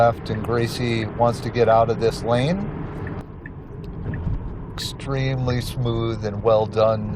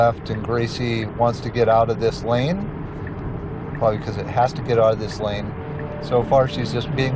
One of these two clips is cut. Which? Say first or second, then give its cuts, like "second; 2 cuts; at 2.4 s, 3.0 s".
first; 1 cut; at 3.2 s